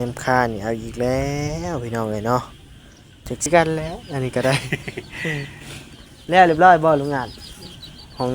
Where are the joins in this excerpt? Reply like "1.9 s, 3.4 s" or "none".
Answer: 3.5 s

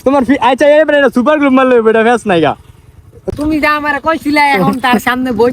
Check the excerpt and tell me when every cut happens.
3.2 s

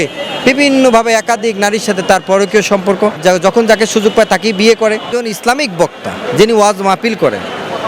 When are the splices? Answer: 3.2 s, 5.1 s

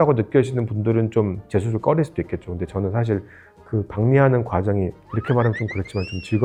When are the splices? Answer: none

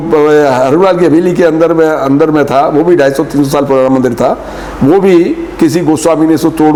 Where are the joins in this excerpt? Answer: none

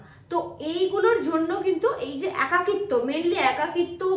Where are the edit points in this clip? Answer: none

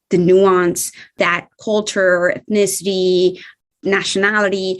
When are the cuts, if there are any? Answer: 3.5 s

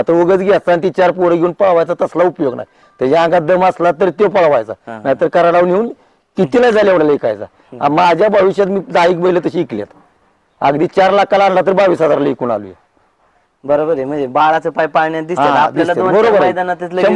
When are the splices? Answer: none

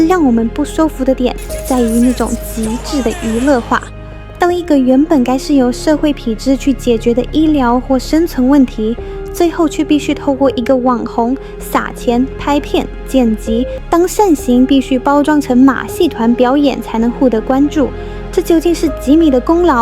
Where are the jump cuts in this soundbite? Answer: 13.8 s

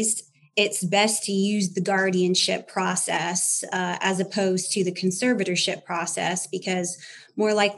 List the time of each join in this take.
none

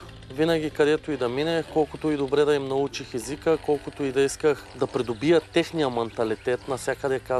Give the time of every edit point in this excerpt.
4.6 s

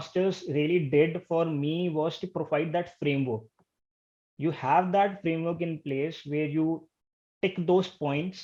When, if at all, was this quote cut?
none

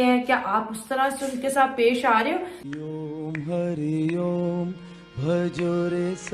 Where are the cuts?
2.6 s

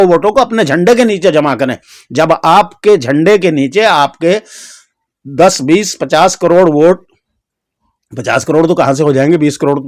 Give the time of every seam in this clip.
none

